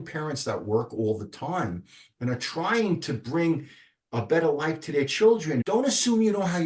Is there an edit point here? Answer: yes; 1 cut; at 5.6 s

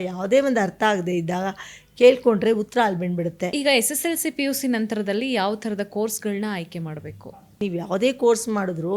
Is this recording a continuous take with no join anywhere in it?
no; 2 cuts; at 3.6 s, 7.6 s

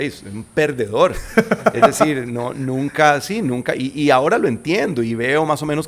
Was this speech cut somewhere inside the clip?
no; 0 cuts

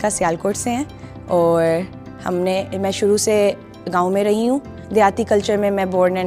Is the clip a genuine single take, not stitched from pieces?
yes; 0 cuts

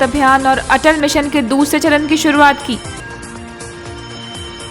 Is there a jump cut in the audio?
no; 0 cuts

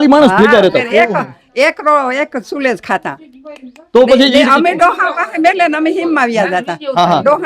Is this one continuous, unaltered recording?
yes; 0 cuts

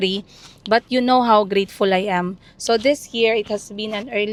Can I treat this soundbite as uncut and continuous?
yes; 0 cuts

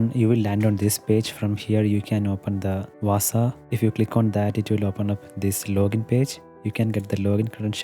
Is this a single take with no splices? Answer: no; 2 cuts; at 2.9 s, 3.6 s

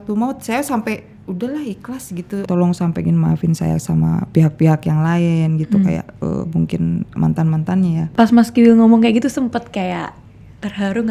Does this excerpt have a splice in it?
yes; 2 cuts; at 2.5 s, 8.0 s

